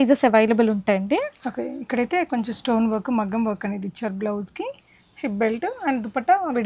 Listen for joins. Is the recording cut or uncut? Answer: uncut